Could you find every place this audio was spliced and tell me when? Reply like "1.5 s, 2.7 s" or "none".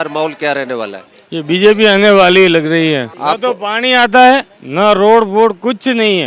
3.1 s